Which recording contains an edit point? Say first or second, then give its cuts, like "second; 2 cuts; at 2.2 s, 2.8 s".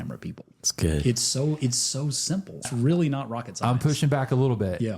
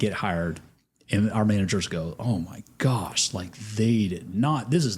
first; 1 cut; at 2.7 s